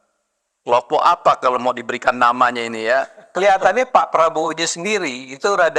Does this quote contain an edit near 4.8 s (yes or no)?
no